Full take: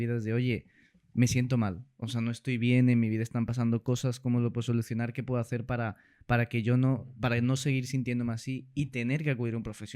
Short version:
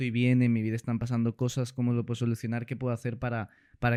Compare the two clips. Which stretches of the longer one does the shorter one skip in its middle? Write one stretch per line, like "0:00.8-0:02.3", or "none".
none

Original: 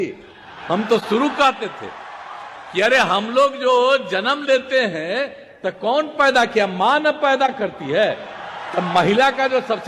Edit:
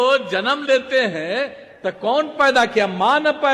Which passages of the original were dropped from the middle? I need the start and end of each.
none

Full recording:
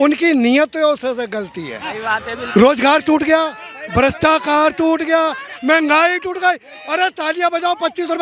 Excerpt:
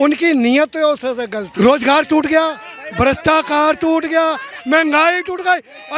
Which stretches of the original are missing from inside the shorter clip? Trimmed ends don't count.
0:01.4-0:02.4

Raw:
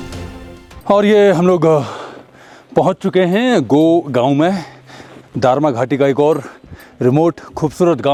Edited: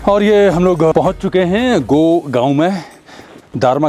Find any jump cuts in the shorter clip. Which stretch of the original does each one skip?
0:01.7-0:02.7

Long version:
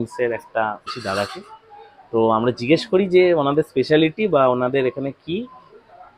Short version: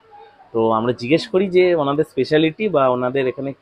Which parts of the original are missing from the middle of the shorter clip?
none

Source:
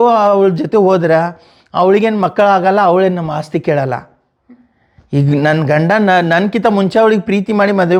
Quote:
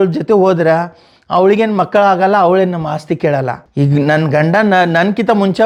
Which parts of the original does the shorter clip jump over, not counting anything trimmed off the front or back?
0:04.0-0:05.0

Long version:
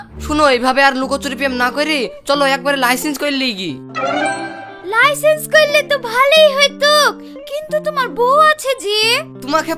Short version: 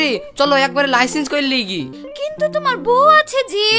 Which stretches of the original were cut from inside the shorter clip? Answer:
0:03.9-0:07.3

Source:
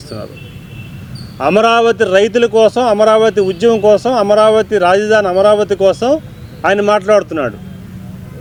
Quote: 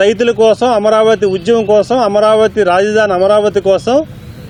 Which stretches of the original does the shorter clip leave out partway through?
none

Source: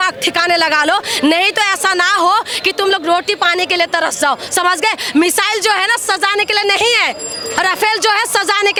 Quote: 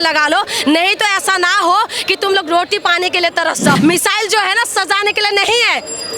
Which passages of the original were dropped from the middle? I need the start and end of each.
0:04.3-0:05.1

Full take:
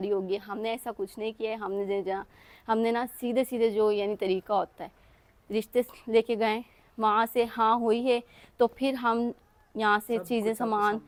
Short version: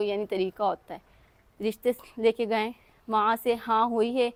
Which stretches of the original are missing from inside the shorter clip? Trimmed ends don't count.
none

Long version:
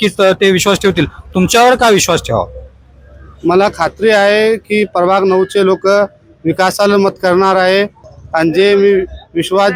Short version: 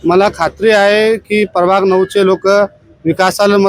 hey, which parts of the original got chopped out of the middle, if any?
none

